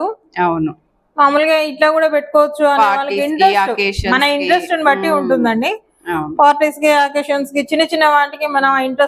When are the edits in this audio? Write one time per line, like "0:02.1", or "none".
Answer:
none